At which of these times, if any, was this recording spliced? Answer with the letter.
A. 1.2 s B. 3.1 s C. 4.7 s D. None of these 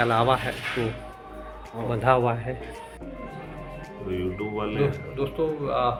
D